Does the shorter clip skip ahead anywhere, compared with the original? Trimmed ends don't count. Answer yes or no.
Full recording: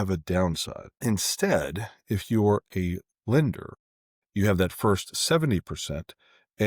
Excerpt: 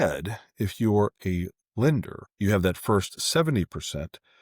yes